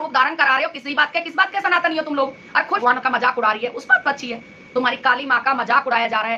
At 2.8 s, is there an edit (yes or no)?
yes